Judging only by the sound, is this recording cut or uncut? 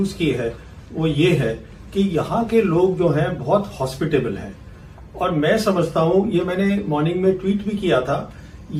uncut